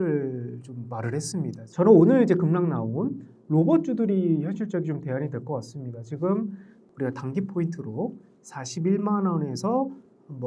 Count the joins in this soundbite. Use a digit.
2